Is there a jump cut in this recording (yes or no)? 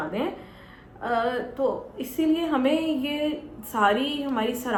no